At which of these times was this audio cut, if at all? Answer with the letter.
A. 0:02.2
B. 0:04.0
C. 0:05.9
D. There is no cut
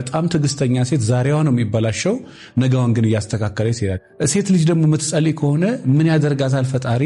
B